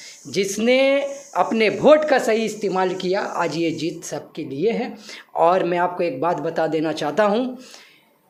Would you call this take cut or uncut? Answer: uncut